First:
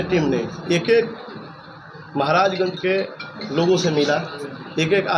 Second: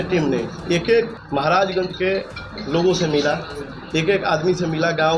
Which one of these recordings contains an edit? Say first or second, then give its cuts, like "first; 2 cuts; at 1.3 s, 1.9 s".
second; 1 cut; at 1.2 s